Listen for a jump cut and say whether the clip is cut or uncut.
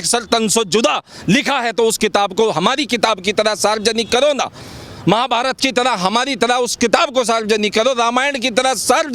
uncut